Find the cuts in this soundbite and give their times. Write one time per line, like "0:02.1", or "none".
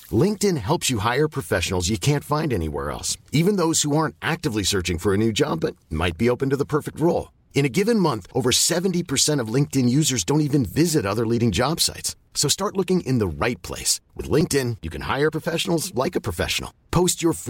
none

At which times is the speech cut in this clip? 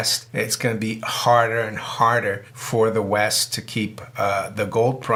none

